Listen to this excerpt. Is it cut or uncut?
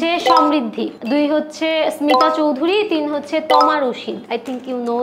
uncut